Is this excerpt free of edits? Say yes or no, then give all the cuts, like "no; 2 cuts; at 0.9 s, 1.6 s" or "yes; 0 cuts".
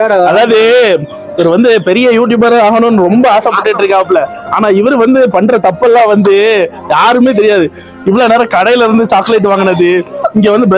yes; 0 cuts